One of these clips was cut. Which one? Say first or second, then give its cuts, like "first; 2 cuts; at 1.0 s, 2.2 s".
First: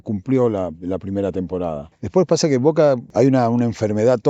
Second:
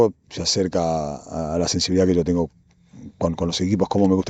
first; 2 cuts; at 1.9 s, 3.1 s